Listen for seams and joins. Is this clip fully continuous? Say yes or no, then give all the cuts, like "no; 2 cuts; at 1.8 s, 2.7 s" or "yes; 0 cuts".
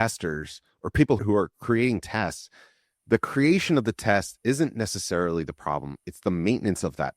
no; 1 cut; at 1.2 s